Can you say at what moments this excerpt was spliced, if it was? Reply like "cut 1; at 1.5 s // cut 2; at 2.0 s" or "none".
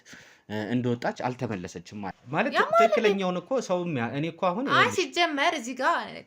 cut 1; at 2.2 s